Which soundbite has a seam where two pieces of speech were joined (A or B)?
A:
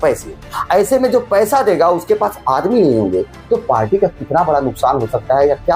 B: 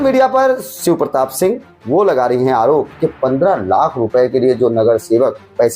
B